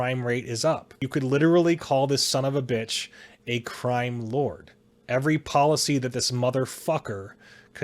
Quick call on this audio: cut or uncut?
cut